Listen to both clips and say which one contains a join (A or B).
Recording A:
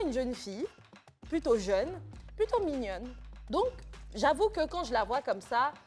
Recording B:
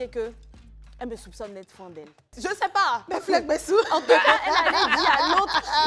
B